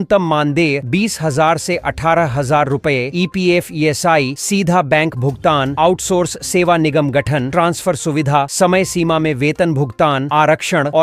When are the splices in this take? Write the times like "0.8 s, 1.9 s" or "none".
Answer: none